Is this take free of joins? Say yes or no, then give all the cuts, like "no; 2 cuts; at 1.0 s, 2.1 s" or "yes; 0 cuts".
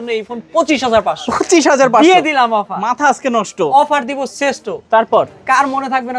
yes; 0 cuts